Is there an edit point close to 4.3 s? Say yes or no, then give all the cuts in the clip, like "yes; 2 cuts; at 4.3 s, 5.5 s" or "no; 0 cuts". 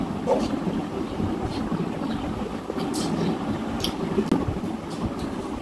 yes; 1 cut; at 4.3 s